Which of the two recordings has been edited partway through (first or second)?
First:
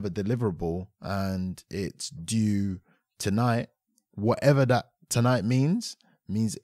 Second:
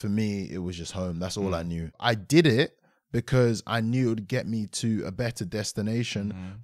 second